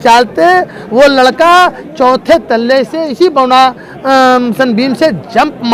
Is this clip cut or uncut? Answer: uncut